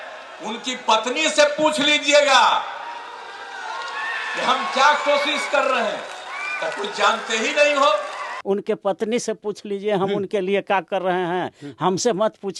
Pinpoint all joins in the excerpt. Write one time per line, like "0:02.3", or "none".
0:08.3